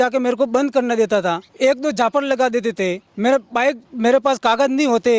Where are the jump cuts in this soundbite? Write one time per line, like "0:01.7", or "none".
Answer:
0:01.5
0:03.1
0:03.9